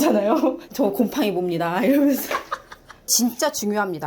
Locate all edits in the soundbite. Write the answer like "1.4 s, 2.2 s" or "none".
3.1 s

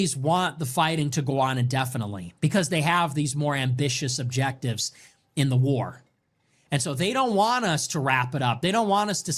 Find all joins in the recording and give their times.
none

